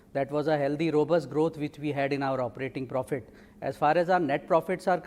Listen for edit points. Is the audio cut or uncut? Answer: uncut